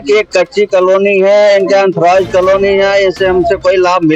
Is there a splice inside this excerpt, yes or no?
no